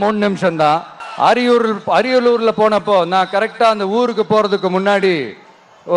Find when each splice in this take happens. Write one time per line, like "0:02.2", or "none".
0:01.0